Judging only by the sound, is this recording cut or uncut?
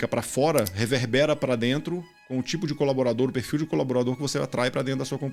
uncut